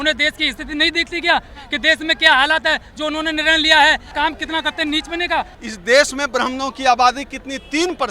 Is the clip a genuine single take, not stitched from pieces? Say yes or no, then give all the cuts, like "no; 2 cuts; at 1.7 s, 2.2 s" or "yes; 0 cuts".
no; 2 cuts; at 4.1 s, 5.6 s